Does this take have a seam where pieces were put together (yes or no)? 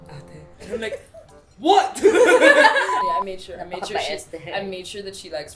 yes